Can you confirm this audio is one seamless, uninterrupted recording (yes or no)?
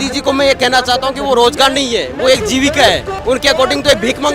no